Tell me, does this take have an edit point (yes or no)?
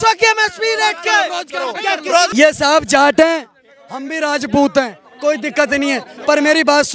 no